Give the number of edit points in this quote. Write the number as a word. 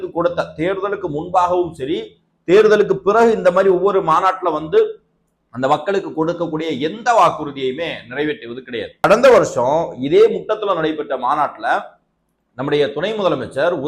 one